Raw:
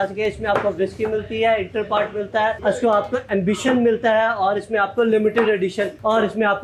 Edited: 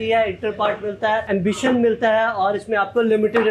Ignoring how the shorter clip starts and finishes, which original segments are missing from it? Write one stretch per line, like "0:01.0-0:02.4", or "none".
0:02.6-0:03.3